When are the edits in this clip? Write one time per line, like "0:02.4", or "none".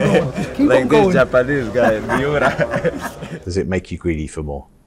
0:03.3